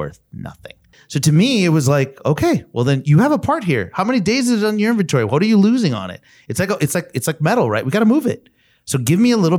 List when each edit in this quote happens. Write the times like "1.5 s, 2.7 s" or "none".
1.0 s